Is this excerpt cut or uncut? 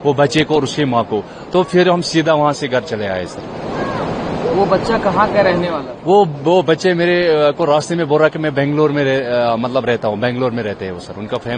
uncut